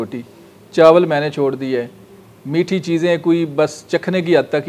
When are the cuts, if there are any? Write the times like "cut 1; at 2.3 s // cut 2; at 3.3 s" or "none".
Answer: none